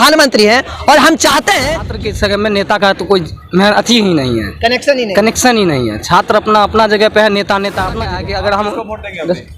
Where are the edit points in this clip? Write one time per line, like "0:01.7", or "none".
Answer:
0:01.9
0:07.9

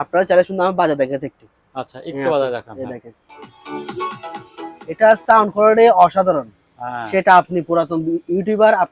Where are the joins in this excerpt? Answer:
none

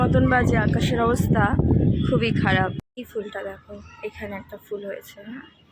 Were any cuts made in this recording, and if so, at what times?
0:02.9

